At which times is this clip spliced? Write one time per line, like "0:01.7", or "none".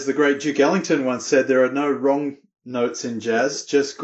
none